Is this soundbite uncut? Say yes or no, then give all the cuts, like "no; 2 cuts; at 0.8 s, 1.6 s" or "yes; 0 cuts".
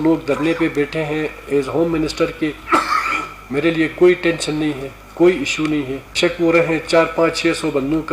yes; 0 cuts